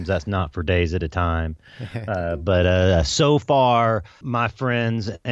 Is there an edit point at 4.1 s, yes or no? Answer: yes